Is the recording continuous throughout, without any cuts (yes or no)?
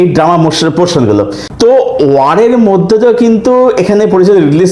no